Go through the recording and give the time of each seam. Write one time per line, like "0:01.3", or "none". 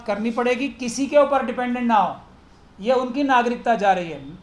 none